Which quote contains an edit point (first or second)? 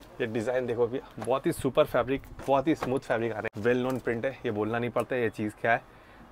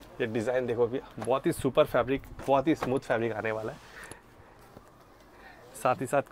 first